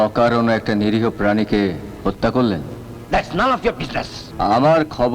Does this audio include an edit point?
yes; 1 cut; at 4.2 s

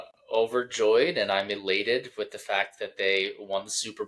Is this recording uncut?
yes; 0 cuts

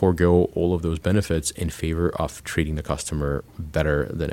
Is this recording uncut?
yes; 0 cuts

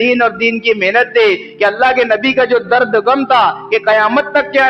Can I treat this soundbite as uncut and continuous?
yes; 0 cuts

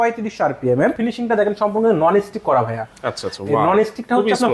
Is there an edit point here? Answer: yes; 1 cut; at 1.0 s

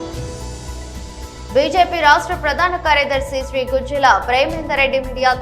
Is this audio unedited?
no; 1 cut; at 1.2 s

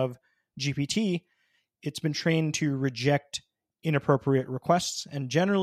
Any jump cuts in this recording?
no; 0 cuts

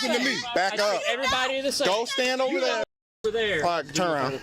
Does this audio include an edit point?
yes; 1 cut; at 3.2 s

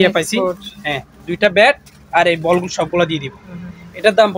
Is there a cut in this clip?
no; 0 cuts

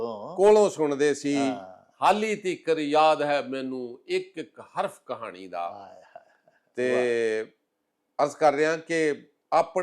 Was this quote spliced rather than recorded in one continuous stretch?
no; 0 cuts

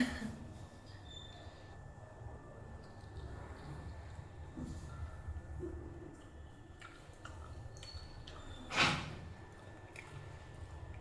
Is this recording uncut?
yes; 0 cuts

